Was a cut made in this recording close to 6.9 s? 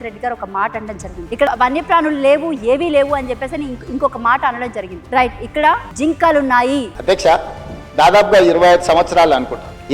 yes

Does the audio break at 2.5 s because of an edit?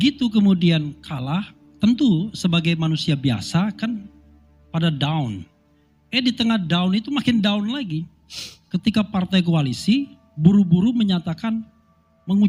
no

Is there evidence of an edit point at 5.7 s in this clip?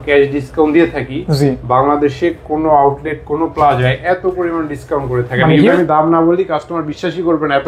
yes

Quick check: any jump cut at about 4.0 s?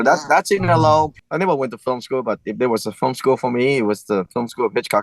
no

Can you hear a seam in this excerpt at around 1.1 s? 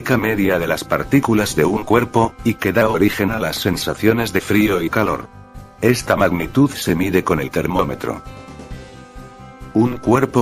no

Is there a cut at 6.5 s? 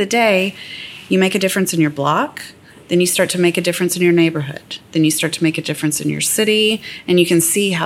no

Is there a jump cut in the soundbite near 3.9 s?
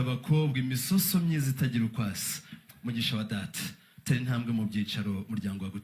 no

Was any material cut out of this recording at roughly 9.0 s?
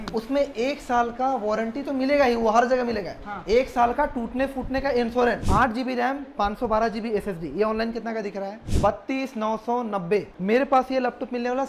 no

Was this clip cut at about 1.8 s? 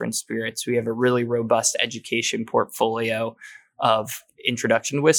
no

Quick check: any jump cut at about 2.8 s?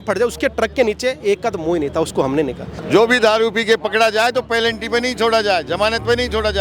yes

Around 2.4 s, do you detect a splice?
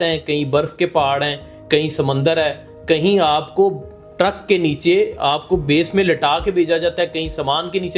no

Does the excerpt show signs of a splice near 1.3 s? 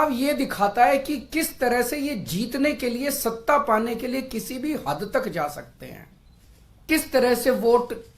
no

